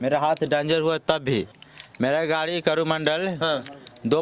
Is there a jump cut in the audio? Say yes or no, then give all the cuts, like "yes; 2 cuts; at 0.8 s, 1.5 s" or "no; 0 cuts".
yes; 1 cut; at 1.6 s